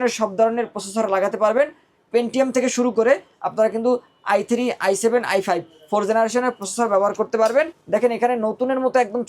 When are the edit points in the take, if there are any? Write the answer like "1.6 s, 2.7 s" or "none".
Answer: 7.8 s